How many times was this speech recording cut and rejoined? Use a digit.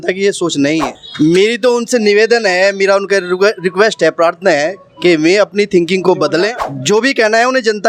0